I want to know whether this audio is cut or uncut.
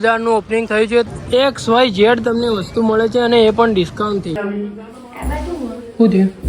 cut